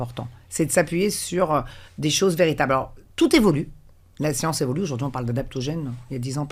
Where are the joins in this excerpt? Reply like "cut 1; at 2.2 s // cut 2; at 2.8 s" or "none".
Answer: none